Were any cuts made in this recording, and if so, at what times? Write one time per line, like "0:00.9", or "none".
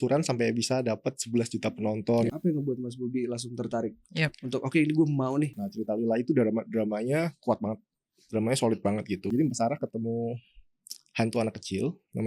0:02.3
0:05.5
0:09.3